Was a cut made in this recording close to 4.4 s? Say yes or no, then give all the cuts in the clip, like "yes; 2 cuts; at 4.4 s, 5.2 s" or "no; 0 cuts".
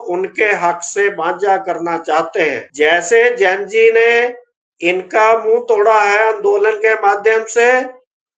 no; 1 cut; at 2.6 s